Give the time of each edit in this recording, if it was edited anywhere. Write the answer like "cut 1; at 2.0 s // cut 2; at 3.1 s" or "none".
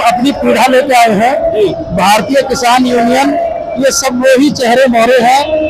none